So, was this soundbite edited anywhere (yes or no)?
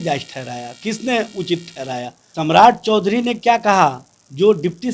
yes